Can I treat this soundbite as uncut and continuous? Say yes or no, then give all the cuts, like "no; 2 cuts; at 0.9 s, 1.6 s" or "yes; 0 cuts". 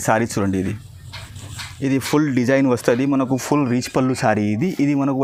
yes; 0 cuts